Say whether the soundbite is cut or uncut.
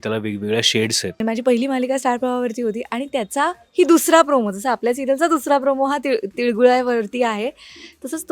cut